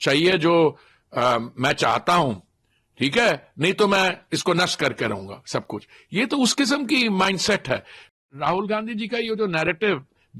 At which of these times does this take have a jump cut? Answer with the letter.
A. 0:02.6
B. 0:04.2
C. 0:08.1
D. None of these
C